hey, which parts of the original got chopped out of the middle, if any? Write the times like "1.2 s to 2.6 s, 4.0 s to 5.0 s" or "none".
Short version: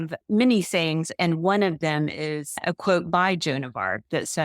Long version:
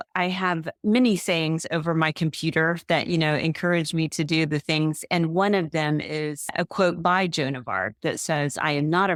1.6 s to 5.0 s